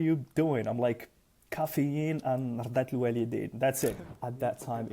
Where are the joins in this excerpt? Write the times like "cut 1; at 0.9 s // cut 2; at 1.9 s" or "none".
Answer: cut 1; at 4.0 s